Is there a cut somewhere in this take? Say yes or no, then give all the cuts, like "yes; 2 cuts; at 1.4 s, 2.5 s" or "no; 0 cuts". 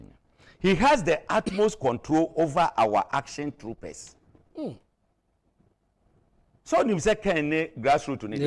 no; 0 cuts